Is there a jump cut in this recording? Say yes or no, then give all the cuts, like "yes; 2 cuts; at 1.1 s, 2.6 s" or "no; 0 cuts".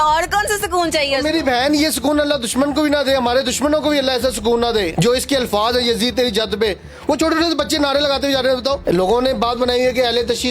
yes; 2 cuts; at 4.9 s, 8.8 s